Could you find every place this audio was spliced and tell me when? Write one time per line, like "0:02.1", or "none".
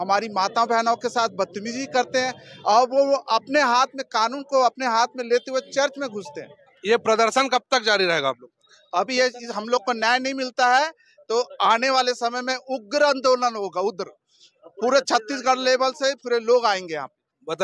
none